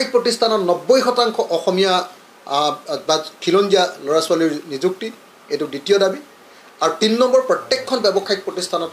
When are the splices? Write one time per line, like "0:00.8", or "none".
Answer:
none